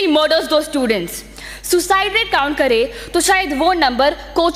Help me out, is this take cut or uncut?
uncut